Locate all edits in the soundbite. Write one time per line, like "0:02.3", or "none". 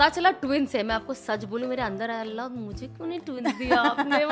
none

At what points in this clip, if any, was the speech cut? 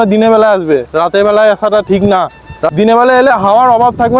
0:02.6

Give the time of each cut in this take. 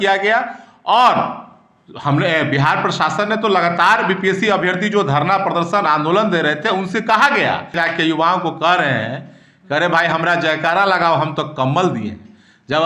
0:07.7

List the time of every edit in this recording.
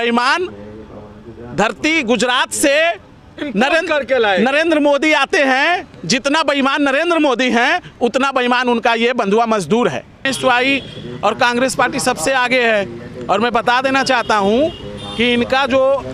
0:10.3

